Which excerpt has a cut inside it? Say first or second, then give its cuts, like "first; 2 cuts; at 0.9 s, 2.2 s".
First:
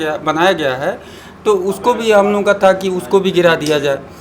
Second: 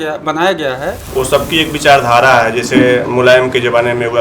second; 1 cut; at 1.0 s